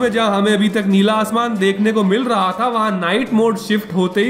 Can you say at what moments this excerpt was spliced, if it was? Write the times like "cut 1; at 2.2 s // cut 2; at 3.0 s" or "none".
none

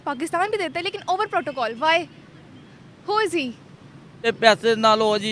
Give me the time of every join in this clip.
cut 1; at 4.2 s

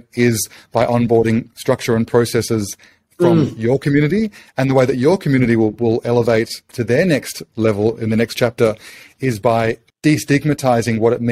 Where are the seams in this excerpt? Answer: cut 1; at 6.7 s // cut 2; at 9.9 s

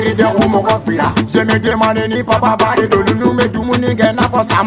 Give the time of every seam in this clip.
none

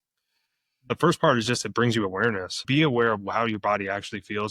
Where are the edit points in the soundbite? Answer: cut 1; at 0.9 s // cut 2; at 2.6 s

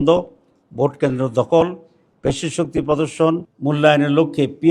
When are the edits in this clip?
cut 1; at 3.5 s

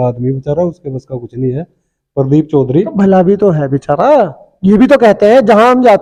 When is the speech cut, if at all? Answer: none

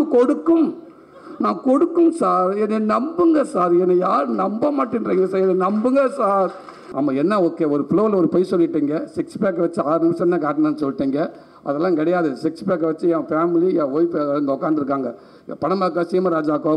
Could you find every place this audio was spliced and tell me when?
cut 1; at 6.8 s

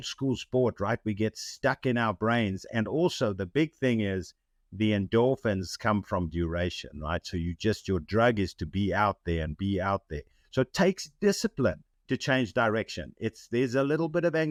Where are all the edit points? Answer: none

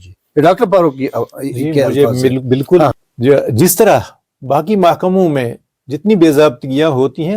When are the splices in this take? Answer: cut 1; at 2.9 s

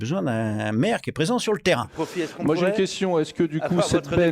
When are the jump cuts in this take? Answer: cut 1; at 1.9 s

